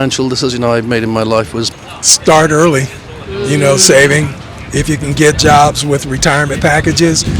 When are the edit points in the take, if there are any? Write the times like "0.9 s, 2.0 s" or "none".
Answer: 1.7 s

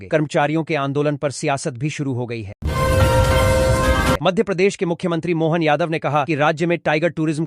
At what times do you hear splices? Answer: 2.6 s, 4.2 s

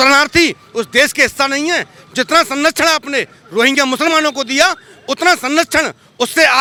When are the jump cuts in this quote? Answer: none

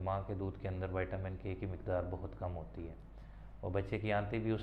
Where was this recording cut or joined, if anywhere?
none

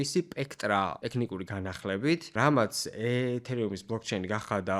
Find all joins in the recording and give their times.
1.0 s, 2.3 s

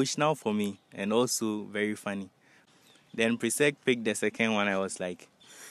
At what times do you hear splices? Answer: 2.6 s

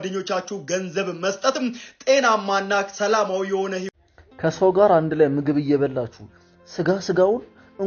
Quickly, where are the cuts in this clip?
3.9 s

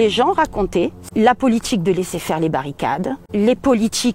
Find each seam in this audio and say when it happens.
1.0 s, 3.2 s

